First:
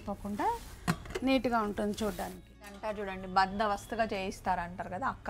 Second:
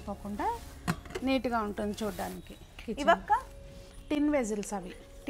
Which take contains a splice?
first; 1 cut; at 2.8 s

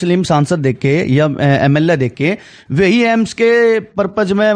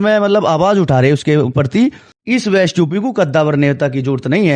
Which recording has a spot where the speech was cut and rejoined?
second; 1 cut; at 2.1 s

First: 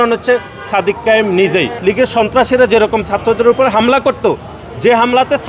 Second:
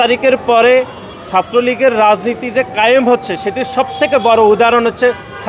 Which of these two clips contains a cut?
first; 1 cut; at 1.7 s

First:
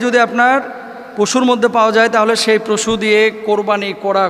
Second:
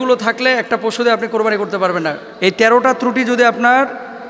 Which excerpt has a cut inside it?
second; 1 cut; at 2.2 s

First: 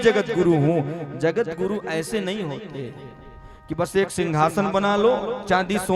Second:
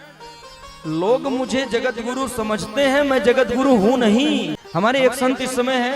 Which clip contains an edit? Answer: second; 1 cut; at 4.6 s

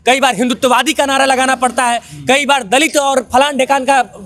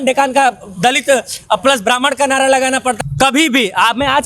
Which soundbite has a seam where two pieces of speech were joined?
second; 1 cut; at 3.0 s

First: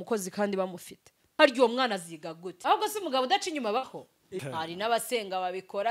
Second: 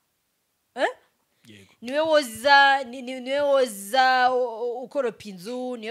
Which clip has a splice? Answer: first; 3 cuts; at 1.2 s, 2.5 s, 4.3 s

